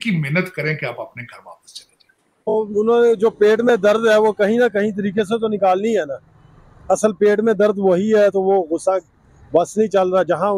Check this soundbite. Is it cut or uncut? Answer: cut